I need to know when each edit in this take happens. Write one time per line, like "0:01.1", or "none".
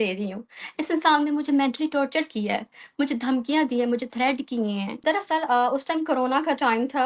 0:04.9